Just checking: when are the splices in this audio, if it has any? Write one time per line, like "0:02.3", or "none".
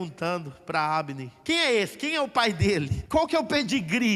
0:01.3
0:03.0